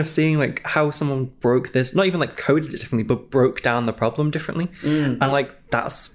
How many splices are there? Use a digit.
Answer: 0